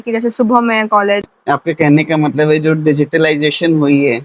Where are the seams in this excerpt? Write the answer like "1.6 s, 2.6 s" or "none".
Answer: 1.3 s